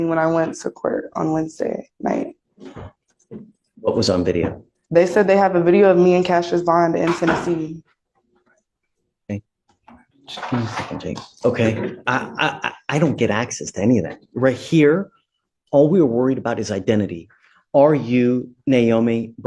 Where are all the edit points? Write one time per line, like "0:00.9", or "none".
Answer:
none